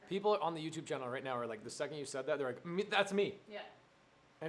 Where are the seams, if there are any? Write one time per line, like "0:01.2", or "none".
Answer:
none